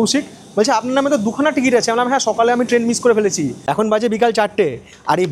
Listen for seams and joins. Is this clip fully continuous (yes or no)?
no